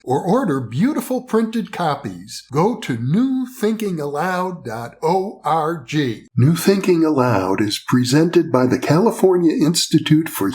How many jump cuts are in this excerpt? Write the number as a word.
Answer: one